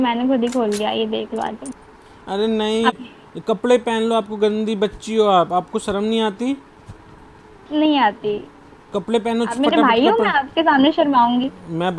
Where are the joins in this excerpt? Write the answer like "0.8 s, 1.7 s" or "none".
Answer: 2.9 s